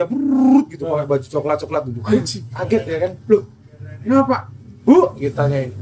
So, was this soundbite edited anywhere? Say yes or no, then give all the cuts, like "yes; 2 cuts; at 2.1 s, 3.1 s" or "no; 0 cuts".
no; 0 cuts